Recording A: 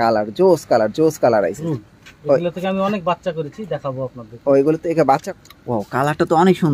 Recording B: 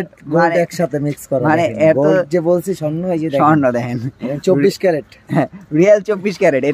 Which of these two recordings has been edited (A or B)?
A